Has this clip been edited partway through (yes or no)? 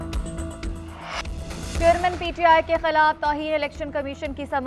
yes